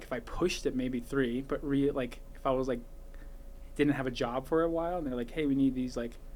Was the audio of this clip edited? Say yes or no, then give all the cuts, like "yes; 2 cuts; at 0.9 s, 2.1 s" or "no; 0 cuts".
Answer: no; 0 cuts